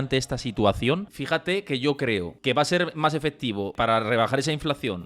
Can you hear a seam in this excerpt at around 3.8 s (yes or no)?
yes